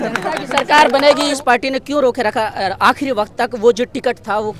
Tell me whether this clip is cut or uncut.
cut